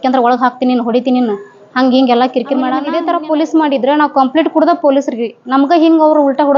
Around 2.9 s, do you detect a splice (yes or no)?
yes